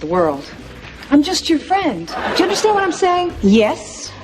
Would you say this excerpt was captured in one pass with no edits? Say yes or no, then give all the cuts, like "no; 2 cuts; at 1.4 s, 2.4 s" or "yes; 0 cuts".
no; 2 cuts; at 2.2 s, 3.3 s